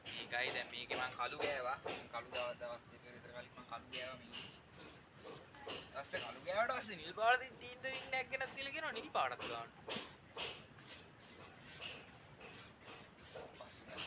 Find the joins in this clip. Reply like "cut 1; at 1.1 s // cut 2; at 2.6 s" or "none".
none